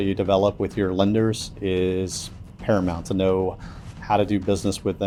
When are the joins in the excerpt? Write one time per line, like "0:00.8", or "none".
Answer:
none